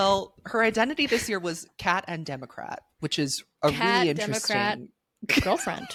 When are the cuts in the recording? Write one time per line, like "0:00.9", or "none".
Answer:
none